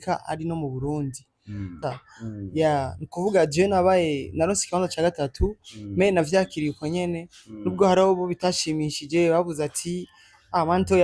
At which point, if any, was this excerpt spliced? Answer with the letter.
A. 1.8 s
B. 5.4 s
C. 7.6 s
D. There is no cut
A